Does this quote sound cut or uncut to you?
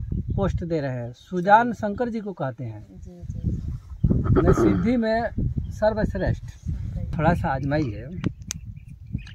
cut